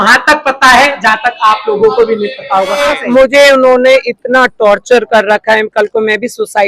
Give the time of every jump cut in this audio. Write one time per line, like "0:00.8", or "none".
0:02.9